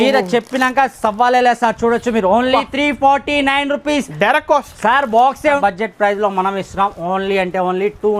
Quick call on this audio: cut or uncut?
cut